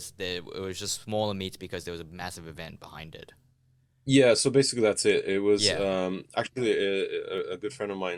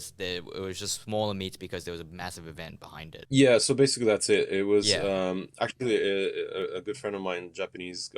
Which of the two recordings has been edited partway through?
second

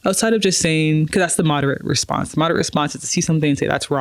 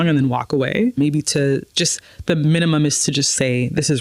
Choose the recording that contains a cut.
second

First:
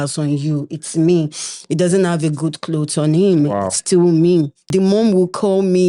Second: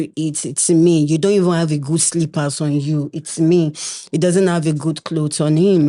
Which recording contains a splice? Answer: first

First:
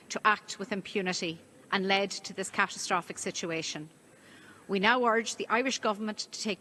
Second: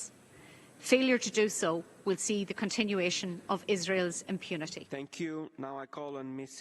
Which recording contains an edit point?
second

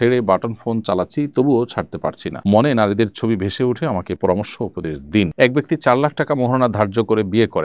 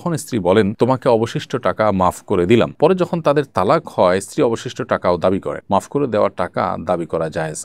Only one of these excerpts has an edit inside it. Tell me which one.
first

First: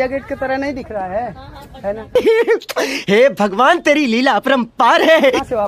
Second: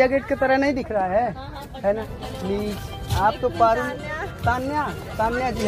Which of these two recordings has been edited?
second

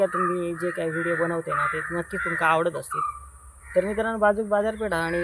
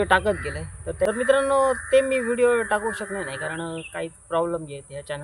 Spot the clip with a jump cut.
second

